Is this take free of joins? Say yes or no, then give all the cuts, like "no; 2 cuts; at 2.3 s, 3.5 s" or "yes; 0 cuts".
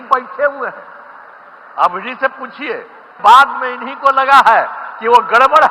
no; 1 cut; at 3.1 s